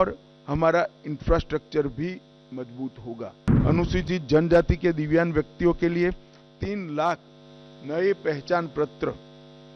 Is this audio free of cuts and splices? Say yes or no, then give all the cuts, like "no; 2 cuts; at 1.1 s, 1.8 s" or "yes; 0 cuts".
no; 1 cut; at 3.6 s